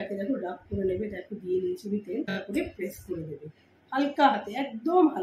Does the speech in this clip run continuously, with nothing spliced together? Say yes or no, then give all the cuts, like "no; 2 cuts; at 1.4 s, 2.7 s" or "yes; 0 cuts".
no; 1 cut; at 2.4 s